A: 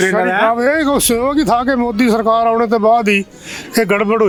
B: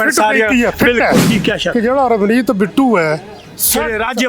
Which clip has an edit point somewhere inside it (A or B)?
B